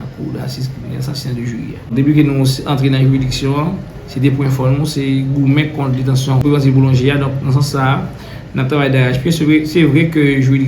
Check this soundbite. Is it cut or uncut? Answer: cut